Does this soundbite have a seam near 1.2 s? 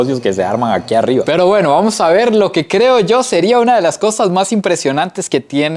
yes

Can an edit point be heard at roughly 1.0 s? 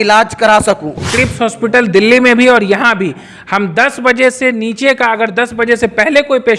yes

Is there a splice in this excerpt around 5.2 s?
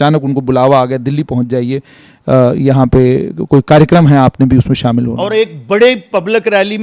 yes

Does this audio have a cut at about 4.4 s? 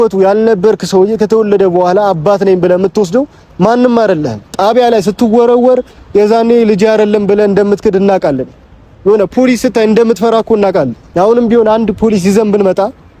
yes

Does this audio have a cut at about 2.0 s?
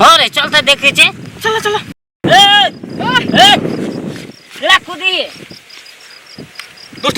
yes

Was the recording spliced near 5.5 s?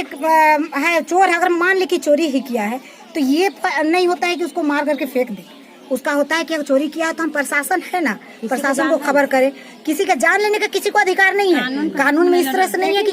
no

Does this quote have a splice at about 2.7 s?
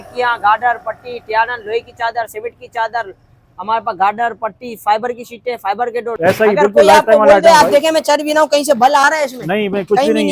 no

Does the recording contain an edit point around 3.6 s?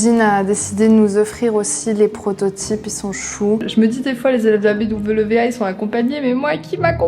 yes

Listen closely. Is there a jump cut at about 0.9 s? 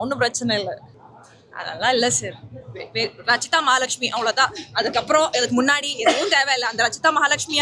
yes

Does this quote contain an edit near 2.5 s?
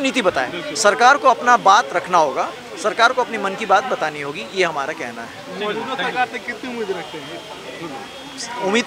no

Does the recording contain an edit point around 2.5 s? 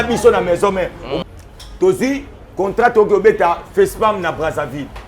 no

